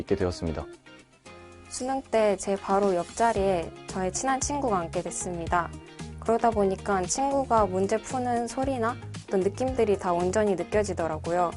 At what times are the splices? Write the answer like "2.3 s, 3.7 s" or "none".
none

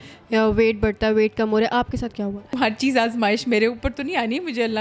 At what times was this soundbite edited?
2.6 s

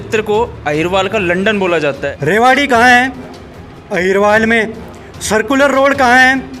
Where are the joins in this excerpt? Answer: 2.1 s

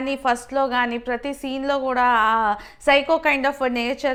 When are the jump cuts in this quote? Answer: none

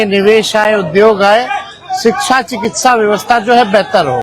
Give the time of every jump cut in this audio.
none

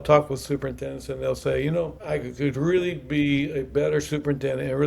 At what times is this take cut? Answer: 2.0 s

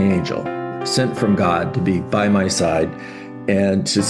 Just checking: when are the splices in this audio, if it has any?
none

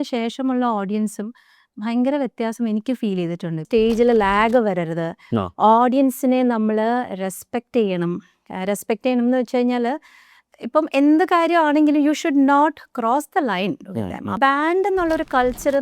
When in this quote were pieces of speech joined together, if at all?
3.6 s, 14.4 s

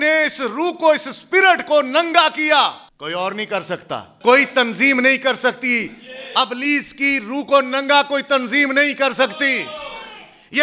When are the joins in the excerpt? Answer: 2.9 s, 4.1 s

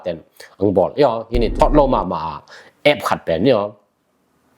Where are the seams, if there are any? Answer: 1.5 s

